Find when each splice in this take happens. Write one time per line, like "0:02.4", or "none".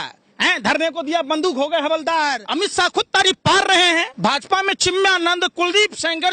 0:02.4
0:04.1